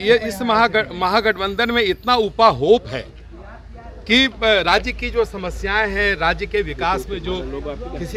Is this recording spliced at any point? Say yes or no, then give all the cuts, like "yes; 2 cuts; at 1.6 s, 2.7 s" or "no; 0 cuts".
no; 0 cuts